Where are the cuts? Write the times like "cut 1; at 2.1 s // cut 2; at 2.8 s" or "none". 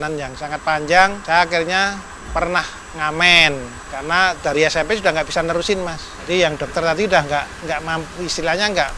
cut 1; at 1.2 s